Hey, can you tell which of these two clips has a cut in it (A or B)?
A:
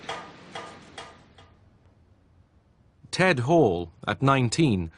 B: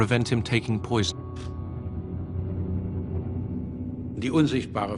A